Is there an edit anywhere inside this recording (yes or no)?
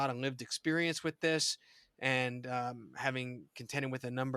no